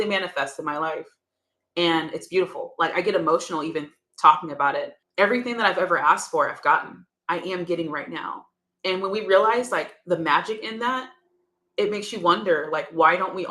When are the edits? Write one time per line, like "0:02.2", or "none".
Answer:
0:05.0

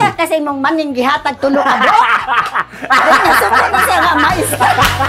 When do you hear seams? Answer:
none

